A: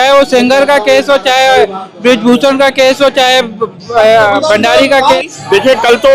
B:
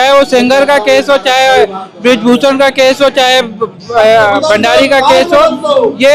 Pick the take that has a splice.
A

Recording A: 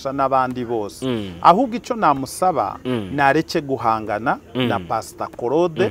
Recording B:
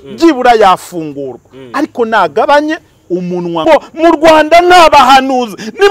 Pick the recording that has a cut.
B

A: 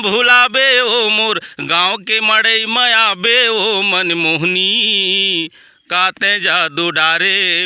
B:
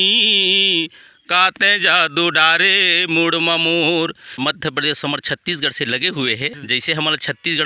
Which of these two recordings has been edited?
B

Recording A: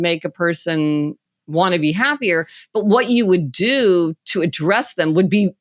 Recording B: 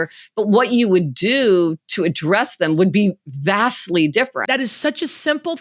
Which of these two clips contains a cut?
B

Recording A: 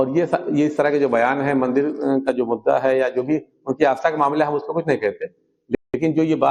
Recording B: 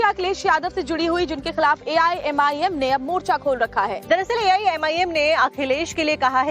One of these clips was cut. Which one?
B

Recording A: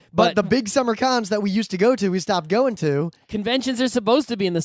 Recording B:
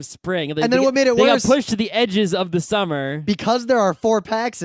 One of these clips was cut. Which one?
B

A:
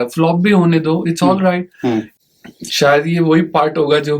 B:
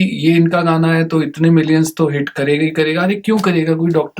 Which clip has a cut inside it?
A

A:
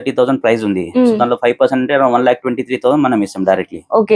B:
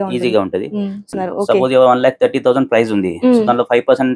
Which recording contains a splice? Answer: B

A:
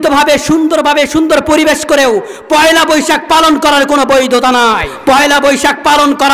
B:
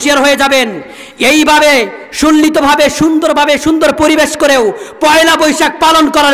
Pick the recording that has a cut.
A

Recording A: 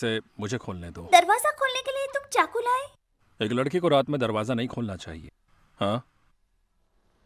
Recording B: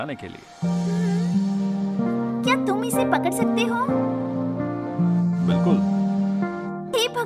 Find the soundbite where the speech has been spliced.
B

